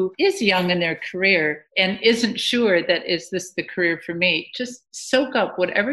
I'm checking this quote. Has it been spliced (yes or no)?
yes